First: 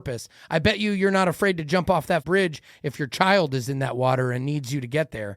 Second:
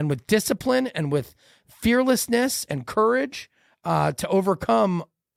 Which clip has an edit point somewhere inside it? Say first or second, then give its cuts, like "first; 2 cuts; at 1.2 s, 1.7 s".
first; 1 cut; at 2.2 s